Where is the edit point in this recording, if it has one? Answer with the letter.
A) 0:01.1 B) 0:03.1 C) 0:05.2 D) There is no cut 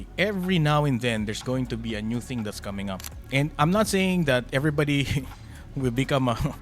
B